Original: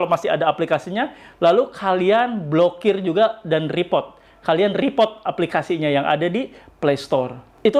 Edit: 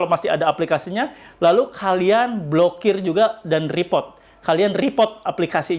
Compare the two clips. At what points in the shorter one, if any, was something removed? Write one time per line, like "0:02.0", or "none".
none